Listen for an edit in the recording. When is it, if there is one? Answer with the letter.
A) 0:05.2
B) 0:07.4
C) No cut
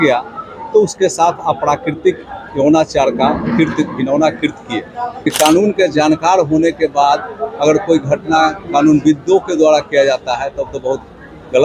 A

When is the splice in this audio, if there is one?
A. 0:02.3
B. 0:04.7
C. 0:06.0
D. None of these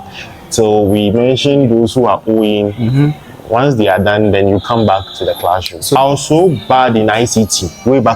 C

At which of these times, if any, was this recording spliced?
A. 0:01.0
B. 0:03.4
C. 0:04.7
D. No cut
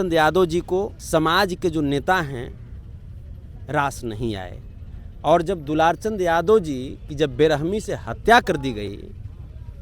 A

